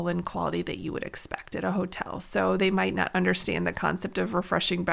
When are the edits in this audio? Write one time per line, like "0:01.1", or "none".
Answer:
none